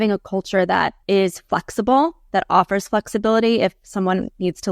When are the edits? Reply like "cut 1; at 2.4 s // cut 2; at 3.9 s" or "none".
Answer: cut 1; at 1.0 s

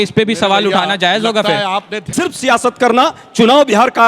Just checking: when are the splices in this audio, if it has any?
cut 1; at 2.0 s

